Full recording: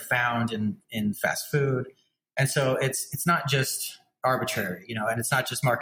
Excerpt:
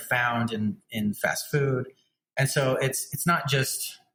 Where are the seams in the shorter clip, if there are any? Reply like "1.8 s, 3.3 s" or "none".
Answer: none